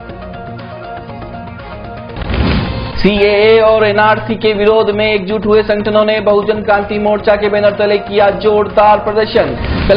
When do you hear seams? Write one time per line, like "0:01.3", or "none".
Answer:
0:02.1